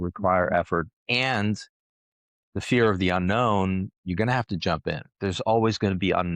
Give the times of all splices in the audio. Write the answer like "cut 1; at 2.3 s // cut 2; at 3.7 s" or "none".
cut 1; at 1.0 s // cut 2; at 5.1 s